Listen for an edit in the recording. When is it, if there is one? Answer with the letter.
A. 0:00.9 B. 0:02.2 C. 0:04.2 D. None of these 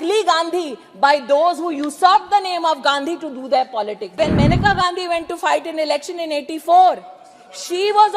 C